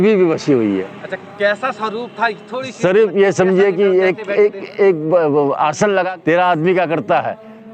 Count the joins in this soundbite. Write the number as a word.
one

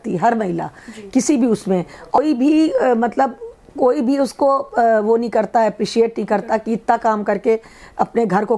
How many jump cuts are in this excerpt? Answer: one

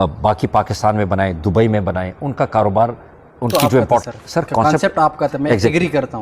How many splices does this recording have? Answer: one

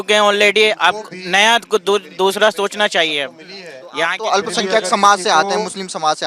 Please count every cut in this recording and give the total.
zero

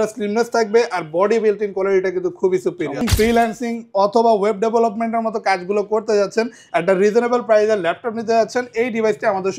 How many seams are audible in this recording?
one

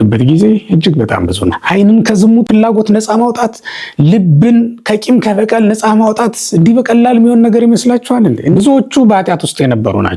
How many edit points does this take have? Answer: three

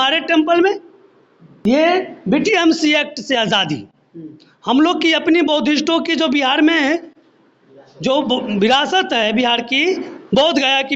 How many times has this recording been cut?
one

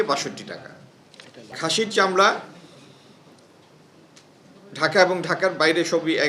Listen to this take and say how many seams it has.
one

